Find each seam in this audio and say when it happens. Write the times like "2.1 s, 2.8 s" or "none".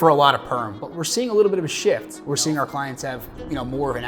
2.1 s